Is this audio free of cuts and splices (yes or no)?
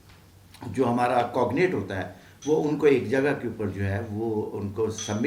yes